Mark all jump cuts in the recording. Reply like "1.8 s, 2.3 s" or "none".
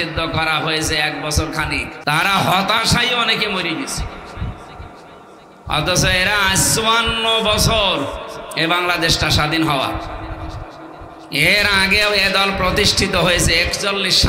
1.9 s